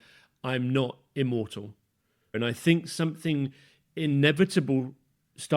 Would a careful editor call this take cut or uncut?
cut